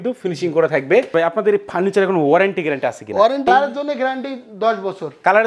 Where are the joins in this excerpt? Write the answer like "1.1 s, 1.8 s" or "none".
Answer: 1.1 s, 3.5 s